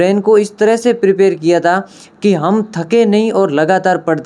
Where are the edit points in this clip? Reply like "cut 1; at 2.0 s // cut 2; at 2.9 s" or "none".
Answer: none